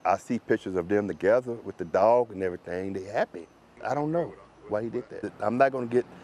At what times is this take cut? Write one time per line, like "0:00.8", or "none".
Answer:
0:05.2